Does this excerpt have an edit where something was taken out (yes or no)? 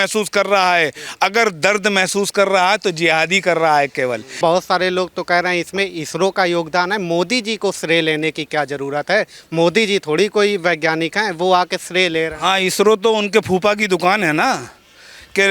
yes